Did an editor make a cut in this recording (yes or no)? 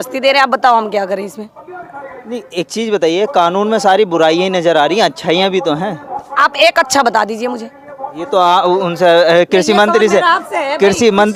no